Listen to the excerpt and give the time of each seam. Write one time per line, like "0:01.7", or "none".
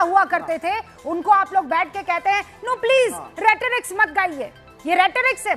none